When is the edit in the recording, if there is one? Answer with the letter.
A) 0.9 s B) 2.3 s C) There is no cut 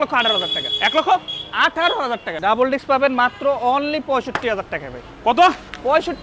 B